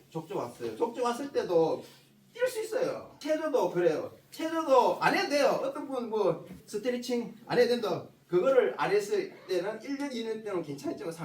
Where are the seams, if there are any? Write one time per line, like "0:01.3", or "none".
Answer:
0:03.1
0:06.7
0:08.1